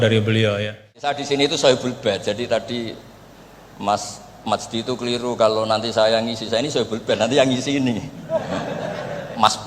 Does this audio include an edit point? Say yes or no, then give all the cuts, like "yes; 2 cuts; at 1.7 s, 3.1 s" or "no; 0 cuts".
yes; 1 cut; at 1.0 s